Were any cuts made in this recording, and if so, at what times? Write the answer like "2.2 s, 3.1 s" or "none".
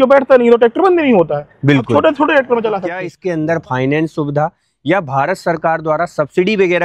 3.1 s

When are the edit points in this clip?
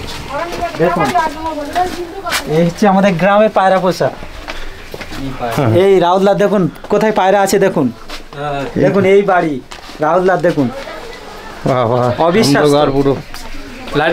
none

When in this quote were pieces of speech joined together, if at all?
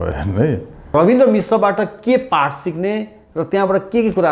0.9 s

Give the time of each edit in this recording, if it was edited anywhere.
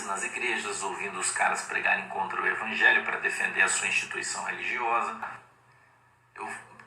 5.2 s

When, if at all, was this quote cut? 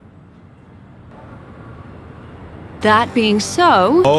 1.1 s, 2.8 s

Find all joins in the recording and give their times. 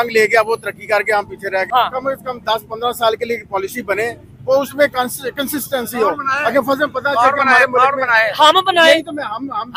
1.7 s

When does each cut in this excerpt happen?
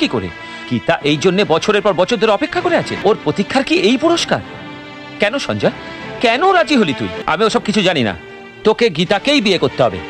2.9 s, 7.2 s

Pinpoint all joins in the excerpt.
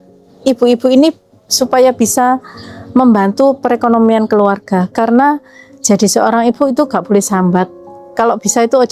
none

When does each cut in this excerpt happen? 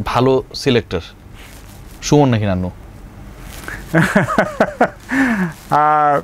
none

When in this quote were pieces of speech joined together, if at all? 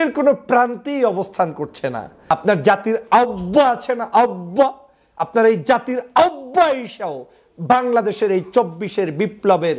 2.3 s

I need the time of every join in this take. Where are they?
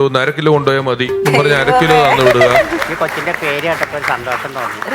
1.2 s, 2.7 s

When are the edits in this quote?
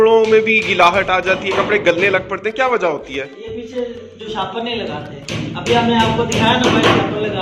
none

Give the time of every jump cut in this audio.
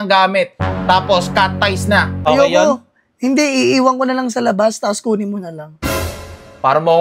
2.1 s

